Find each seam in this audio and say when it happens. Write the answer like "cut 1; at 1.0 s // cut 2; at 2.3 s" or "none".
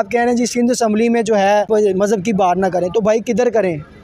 cut 1; at 1.7 s